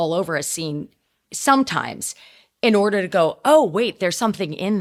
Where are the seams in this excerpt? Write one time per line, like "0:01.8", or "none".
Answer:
none